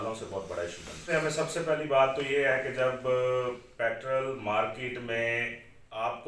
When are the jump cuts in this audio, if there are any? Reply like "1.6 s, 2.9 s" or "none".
1.0 s